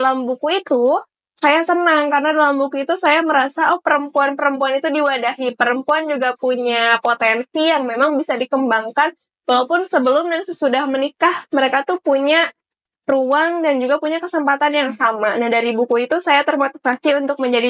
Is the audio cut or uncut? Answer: uncut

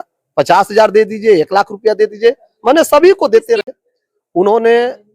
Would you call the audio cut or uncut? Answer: cut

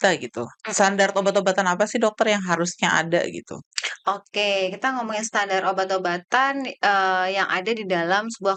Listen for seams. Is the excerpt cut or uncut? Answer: uncut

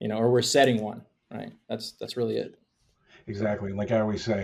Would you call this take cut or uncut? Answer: uncut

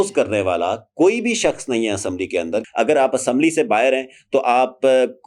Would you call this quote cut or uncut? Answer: cut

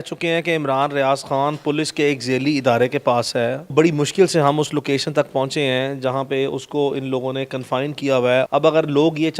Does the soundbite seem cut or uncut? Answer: cut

